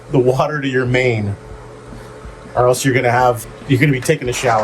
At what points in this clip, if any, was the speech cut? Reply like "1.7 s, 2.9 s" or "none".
3.5 s